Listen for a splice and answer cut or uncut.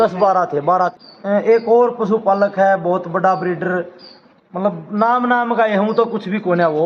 cut